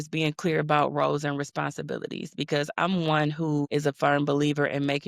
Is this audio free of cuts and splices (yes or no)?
yes